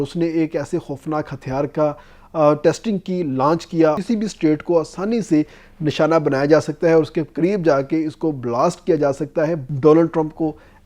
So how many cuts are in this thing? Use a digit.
2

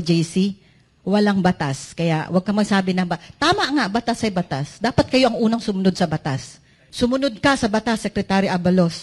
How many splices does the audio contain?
1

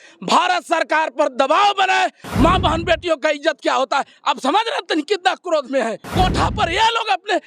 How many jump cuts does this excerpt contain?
2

